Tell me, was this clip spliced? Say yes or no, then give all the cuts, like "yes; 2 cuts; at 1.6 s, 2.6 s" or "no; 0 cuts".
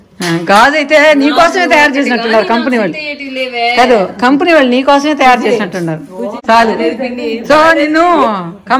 yes; 1 cut; at 6.4 s